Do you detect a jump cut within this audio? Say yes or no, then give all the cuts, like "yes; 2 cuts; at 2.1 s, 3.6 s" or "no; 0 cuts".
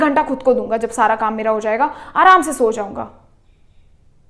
no; 0 cuts